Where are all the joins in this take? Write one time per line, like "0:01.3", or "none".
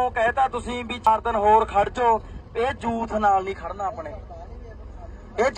0:01.1

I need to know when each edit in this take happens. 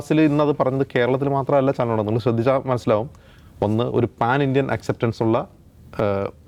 none

